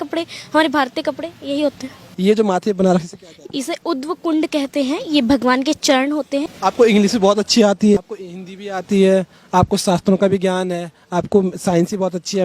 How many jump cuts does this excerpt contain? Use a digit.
3